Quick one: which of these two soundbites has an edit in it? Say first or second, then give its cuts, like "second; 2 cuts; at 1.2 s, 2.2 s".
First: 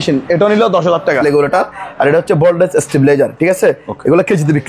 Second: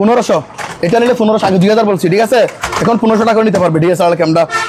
first; 1 cut; at 1.2 s